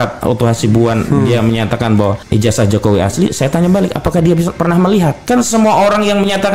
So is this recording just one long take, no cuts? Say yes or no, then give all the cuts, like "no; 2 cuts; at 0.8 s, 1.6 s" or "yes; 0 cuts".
no; 2 cuts; at 2.2 s, 5.2 s